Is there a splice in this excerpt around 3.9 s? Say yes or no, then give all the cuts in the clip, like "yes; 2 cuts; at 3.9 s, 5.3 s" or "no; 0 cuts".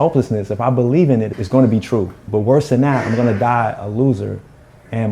no; 2 cuts; at 1.3 s, 2.3 s